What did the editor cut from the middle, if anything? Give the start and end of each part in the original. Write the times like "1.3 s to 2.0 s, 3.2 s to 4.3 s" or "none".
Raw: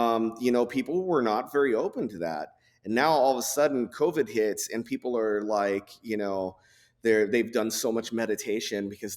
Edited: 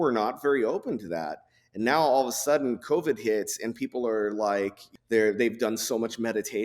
5.9 s to 6.8 s